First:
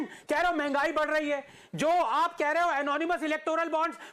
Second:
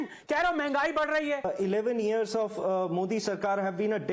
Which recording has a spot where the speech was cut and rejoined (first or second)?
second